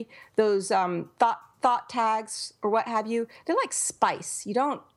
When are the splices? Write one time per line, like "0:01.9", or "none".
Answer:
none